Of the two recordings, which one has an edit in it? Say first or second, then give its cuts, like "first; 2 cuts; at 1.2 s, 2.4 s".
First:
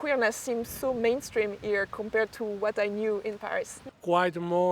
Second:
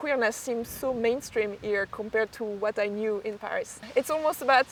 first; 1 cut; at 3.8 s